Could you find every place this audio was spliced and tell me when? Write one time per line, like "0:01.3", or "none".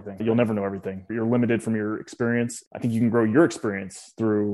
0:01.1
0:02.6